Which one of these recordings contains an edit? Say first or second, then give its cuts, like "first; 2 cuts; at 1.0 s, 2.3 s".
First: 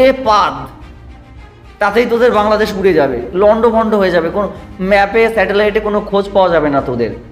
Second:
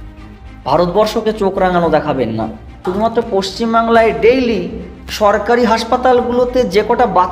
second; 1 cut; at 2.8 s